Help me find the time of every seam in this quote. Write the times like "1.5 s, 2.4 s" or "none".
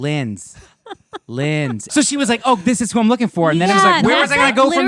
1.9 s